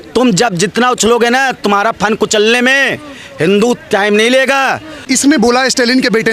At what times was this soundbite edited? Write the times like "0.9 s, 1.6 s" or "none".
none